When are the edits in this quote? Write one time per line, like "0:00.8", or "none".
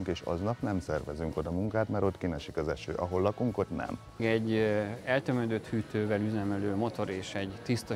0:04.2